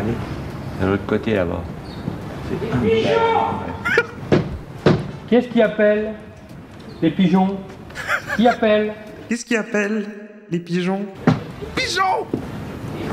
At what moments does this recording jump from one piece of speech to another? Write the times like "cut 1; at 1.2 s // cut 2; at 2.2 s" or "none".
cut 1; at 9.1 s // cut 2; at 11.1 s